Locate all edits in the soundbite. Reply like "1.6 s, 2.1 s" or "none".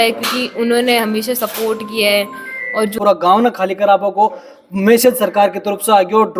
2.9 s